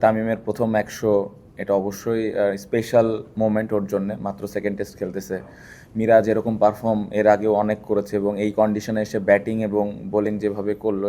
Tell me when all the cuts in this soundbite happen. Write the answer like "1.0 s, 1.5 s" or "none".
none